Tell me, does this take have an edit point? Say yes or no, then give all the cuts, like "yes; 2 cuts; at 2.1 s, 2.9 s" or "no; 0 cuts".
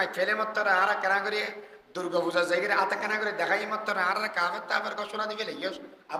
no; 0 cuts